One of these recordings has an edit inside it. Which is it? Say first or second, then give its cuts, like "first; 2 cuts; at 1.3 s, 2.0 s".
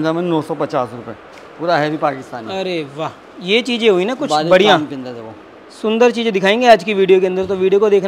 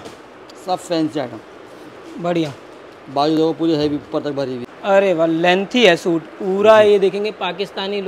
second; 1 cut; at 4.7 s